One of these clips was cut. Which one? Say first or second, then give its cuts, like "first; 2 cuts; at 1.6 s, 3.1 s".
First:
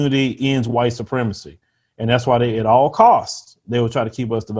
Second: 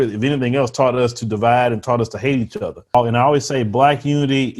second; 1 cut; at 2.9 s